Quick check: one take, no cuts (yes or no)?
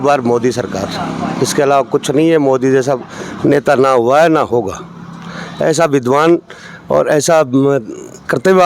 yes